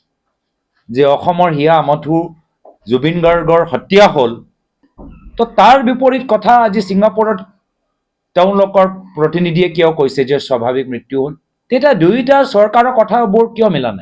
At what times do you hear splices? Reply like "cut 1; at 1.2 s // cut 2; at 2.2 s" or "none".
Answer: cut 1; at 11.5 s